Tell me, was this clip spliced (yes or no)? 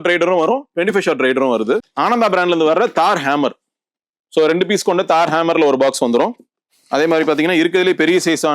yes